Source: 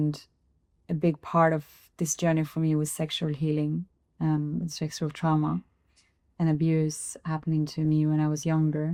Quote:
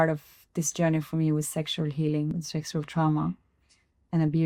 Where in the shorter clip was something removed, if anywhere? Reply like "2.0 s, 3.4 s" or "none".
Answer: 2.4 s